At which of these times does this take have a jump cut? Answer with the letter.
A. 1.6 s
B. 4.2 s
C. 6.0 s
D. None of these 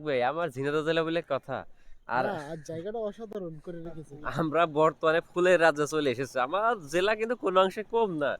B